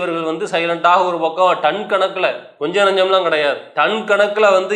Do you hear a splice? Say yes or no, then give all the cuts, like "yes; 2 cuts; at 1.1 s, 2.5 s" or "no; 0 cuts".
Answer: yes; 2 cuts; at 2.5 s, 3.7 s